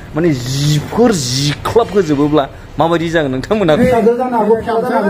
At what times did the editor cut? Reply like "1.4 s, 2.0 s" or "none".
3.8 s